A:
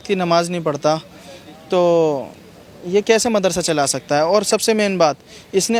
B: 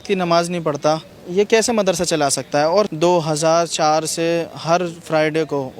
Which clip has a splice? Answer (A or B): B